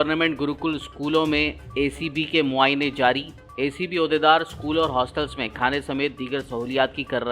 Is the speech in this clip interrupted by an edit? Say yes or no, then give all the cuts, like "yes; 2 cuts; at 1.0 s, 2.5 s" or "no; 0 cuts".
no; 0 cuts